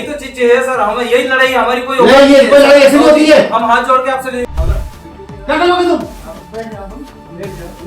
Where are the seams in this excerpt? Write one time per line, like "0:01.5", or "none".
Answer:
none